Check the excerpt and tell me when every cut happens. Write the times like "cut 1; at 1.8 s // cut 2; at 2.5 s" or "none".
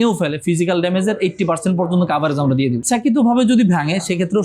cut 1; at 2.8 s